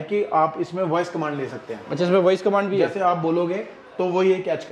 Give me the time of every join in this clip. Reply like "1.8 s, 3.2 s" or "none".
none